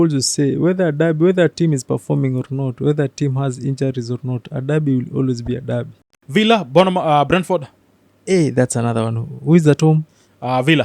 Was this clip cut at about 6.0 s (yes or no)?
yes